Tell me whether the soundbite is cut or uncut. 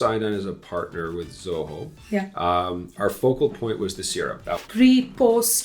cut